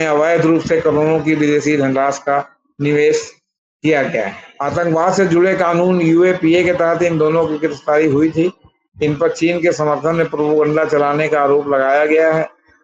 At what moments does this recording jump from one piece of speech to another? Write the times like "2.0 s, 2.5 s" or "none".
4.4 s